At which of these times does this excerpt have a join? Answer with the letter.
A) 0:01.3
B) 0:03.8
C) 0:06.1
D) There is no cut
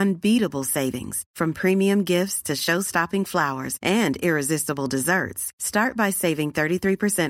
D